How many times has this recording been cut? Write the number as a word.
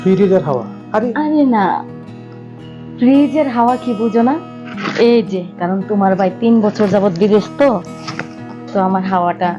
one